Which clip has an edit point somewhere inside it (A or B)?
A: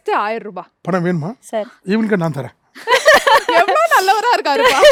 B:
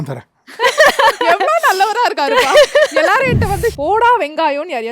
B